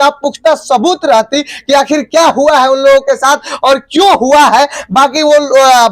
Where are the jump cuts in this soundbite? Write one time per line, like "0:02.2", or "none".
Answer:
none